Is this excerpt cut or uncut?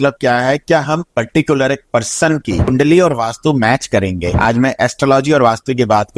cut